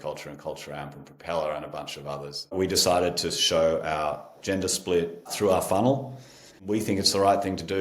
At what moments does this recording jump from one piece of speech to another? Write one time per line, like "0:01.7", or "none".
0:02.5
0:06.6